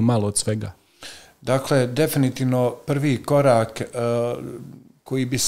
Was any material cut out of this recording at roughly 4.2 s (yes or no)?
no